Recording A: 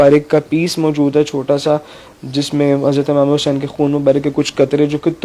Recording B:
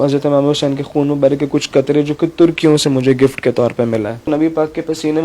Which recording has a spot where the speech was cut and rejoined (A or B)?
B